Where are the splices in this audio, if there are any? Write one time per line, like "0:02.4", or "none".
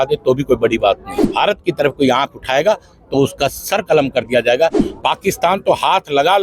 0:01.3
0:04.8

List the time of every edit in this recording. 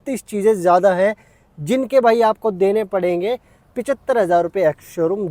none

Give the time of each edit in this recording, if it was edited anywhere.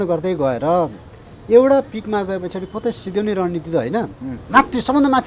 0:04.3

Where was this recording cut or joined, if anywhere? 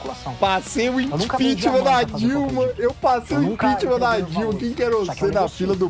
none

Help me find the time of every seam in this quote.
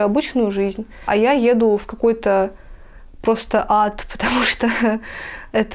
0:01.0

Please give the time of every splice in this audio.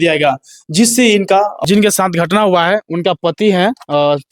0:01.6

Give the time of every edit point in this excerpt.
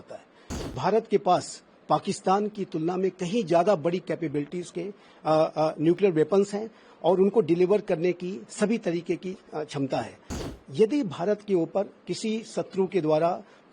0:00.7
0:10.4

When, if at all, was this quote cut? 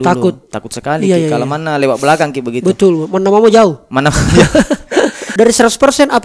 0:05.2

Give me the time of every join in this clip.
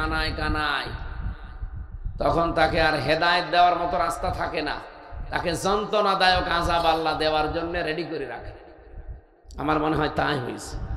none

